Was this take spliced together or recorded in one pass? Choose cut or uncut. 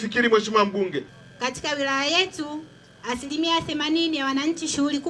cut